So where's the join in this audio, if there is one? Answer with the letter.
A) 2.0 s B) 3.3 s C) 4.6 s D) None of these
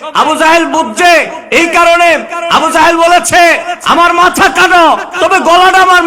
D